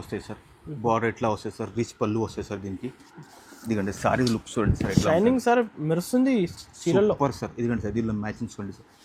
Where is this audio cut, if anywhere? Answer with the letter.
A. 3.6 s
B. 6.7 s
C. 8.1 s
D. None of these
D